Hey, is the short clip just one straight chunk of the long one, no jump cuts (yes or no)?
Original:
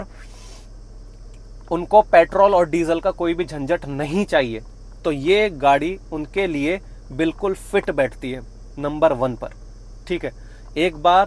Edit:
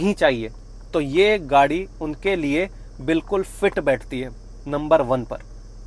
yes